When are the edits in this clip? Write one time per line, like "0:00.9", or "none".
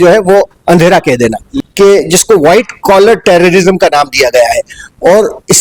0:01.5